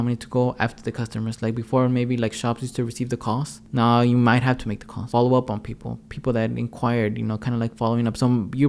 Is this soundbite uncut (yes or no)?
no